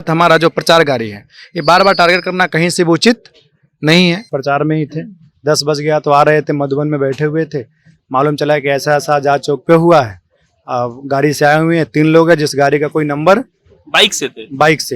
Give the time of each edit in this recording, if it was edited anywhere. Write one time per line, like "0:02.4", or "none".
0:04.3